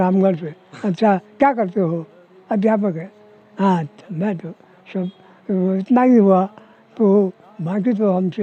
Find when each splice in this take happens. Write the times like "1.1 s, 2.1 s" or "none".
none